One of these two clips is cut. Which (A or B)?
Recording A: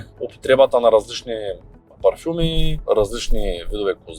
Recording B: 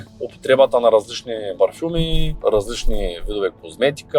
B